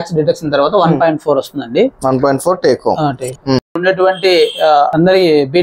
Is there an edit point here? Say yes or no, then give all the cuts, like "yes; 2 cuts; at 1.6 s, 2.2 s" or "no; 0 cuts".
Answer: yes; 1 cut; at 3.7 s